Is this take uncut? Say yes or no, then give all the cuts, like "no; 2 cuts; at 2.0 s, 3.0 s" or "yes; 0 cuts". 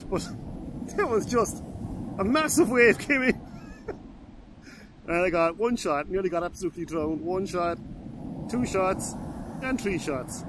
yes; 0 cuts